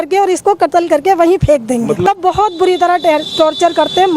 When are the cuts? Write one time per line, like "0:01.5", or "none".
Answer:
0:02.1